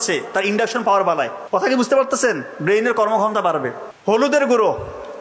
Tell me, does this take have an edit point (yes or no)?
yes